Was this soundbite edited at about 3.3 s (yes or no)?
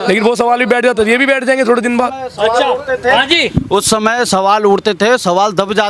no